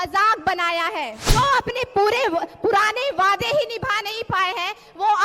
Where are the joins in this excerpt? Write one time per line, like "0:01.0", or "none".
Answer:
0:01.2